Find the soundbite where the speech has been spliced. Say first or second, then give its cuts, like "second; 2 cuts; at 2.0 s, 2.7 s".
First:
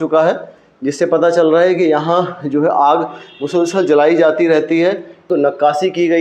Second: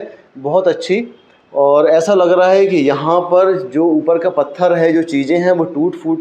first; 1 cut; at 5.3 s